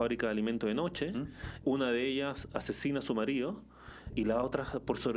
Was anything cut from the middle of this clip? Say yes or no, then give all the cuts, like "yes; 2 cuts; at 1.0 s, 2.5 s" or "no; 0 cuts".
yes; 2 cuts; at 1.6 s, 4.1 s